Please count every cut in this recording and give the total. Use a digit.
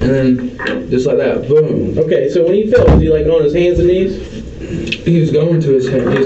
0